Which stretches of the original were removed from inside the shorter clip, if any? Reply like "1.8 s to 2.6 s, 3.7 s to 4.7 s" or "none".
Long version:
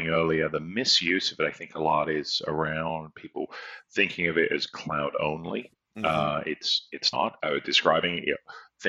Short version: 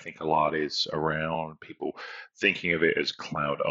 none